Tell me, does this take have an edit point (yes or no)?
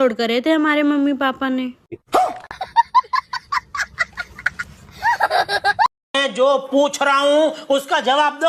yes